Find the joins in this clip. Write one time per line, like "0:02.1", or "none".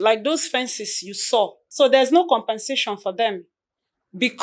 0:01.6